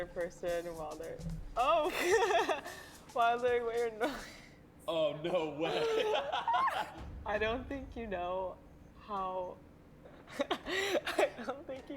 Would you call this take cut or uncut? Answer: cut